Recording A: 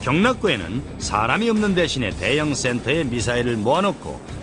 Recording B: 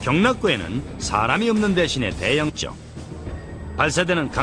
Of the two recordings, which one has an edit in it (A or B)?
A